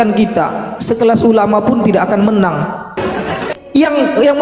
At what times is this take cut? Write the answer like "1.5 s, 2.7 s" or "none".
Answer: 2.9 s